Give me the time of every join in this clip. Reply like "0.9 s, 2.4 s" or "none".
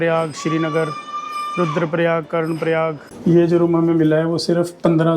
3.1 s